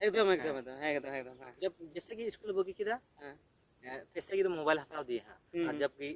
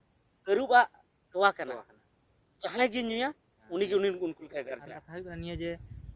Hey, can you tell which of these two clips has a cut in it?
second; 1 cut; at 5.0 s

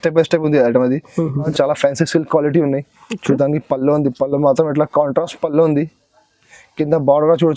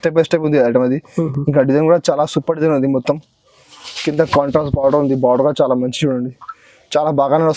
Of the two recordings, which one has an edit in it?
first; 1 cut; at 1.5 s

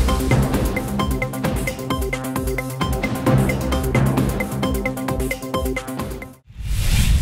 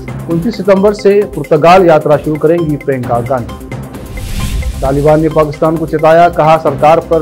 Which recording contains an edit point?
first; 1 cut; at 6.3 s

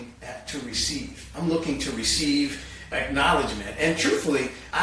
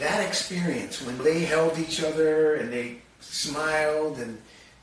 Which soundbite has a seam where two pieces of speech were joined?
second; 1 cut; at 1.2 s

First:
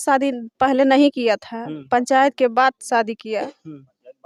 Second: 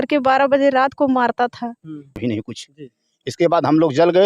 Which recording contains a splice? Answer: second; 1 cut; at 2.2 s

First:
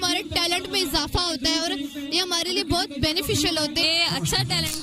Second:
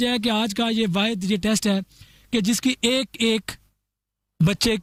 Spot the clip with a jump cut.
first; 1 cut; at 3.8 s

